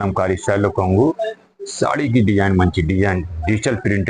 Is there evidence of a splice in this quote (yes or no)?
no